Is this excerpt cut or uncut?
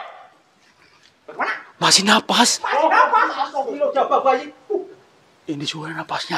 uncut